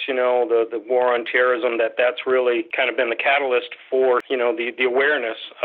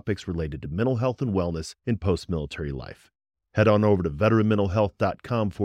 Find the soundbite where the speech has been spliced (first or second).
first